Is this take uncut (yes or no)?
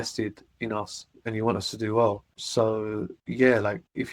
yes